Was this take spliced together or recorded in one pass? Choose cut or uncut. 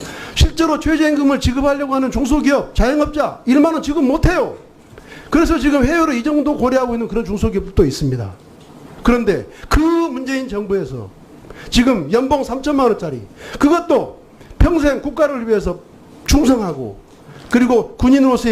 cut